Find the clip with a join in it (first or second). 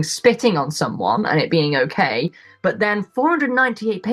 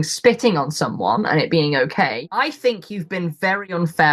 second